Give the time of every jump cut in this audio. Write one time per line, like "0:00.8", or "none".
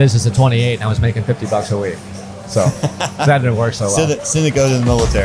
none